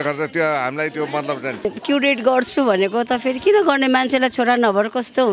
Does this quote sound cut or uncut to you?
cut